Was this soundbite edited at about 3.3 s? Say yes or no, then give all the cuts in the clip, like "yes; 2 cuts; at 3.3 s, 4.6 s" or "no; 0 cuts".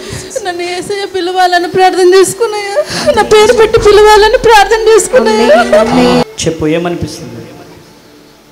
no; 1 cut; at 6.3 s